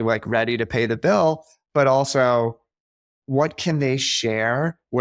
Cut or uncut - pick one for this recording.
uncut